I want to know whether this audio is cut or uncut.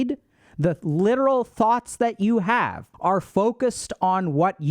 cut